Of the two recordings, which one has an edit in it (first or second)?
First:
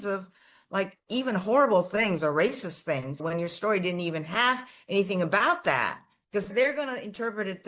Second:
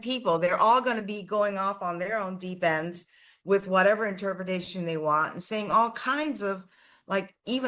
first